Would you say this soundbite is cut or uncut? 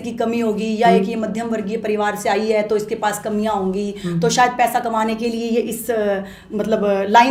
uncut